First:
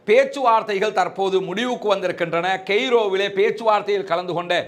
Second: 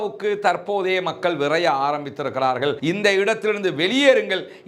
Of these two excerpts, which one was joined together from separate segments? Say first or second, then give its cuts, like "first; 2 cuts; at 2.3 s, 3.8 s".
second; 1 cut; at 2.8 s